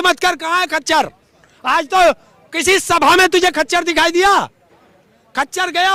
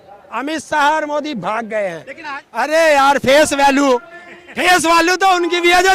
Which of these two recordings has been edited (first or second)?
second